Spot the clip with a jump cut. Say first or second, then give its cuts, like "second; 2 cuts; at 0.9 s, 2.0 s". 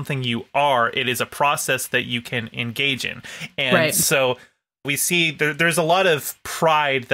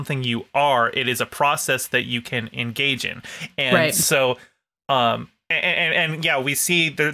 first; 1 cut; at 4.9 s